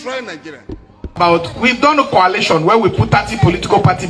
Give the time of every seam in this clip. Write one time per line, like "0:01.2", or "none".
0:01.2